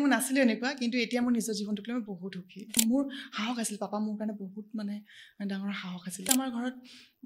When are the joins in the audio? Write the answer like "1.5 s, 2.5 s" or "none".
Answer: 2.8 s, 6.3 s